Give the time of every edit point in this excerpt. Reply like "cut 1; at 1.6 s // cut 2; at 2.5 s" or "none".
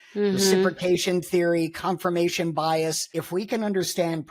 cut 1; at 3.1 s

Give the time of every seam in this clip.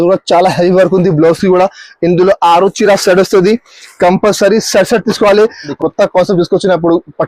cut 1; at 5.7 s

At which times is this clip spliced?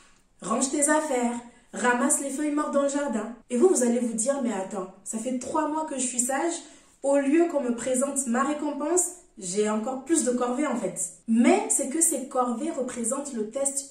none

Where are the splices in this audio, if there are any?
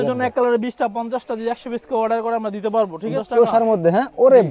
cut 1; at 3.2 s

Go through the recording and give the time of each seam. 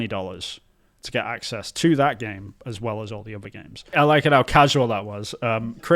cut 1; at 3.9 s

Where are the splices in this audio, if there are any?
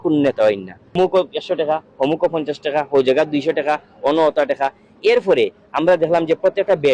cut 1; at 0.9 s

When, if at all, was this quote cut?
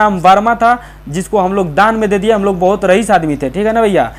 none

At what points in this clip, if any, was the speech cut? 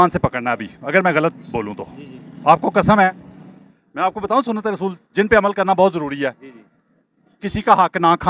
none

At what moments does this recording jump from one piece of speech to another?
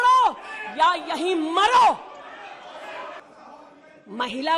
cut 1; at 3.2 s

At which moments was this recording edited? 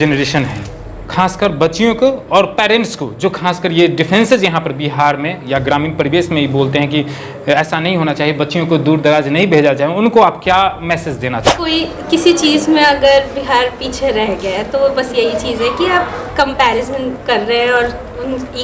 cut 1; at 11.5 s

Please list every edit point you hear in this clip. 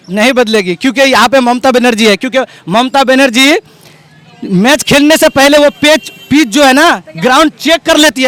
none

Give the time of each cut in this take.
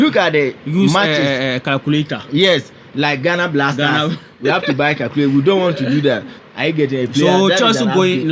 cut 1; at 6.3 s

